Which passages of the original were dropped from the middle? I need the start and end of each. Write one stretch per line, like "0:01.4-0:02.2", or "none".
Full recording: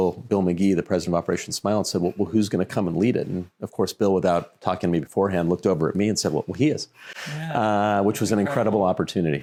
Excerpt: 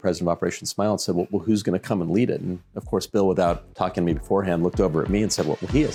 none